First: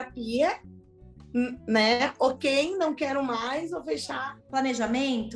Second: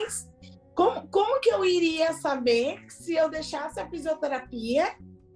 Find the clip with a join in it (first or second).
first